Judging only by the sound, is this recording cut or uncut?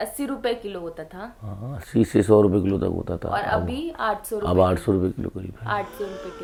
uncut